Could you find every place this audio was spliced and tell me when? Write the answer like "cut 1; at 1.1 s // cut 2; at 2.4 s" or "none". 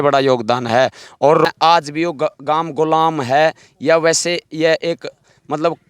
cut 1; at 1.5 s